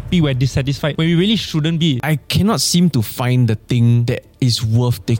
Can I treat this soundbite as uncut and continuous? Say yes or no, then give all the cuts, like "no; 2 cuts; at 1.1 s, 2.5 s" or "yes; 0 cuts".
no; 3 cuts; at 0.9 s, 2.0 s, 4.0 s